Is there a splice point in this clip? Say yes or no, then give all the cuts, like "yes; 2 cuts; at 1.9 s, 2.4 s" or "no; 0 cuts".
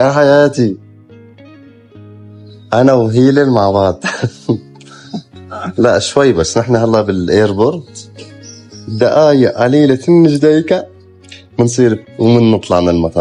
no; 0 cuts